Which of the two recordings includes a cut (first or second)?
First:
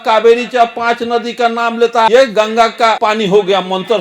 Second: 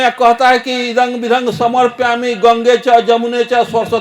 first